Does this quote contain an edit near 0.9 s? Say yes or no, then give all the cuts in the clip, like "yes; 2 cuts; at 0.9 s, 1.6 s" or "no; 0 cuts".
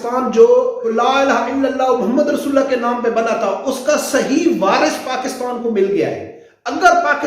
yes; 1 cut; at 0.9 s